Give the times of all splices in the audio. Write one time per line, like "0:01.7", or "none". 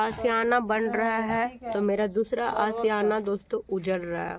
none